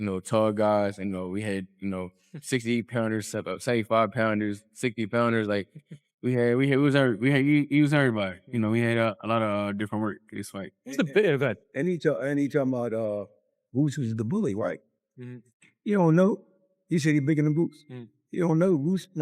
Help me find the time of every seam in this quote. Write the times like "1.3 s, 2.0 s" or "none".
none